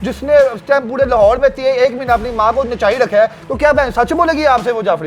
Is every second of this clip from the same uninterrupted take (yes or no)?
yes